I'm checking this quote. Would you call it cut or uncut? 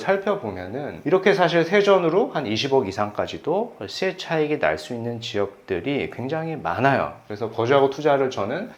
uncut